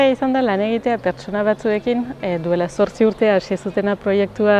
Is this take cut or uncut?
uncut